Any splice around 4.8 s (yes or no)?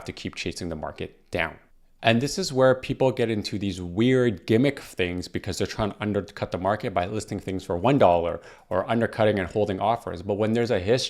no